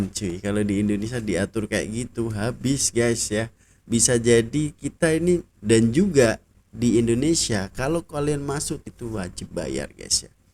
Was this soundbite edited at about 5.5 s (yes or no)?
yes